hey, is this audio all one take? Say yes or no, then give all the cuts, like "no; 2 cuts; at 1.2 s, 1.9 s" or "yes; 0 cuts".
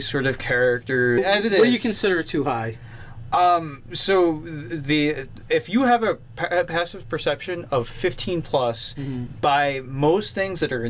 yes; 0 cuts